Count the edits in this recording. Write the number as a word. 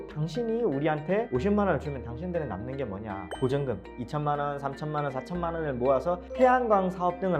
three